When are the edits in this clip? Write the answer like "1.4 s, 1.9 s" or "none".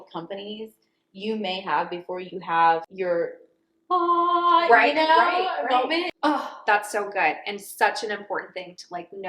2.9 s, 6.1 s